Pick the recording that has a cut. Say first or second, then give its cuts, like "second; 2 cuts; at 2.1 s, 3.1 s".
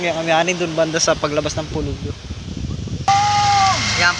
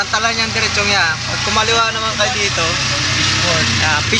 first; 1 cut; at 3.1 s